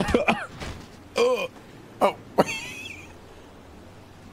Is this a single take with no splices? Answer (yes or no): yes